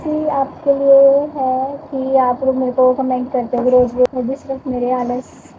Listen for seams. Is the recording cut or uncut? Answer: cut